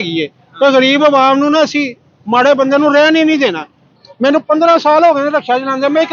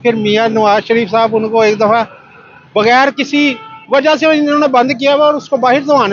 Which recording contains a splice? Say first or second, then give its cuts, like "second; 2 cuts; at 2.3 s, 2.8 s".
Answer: first; 1 cut; at 3.9 s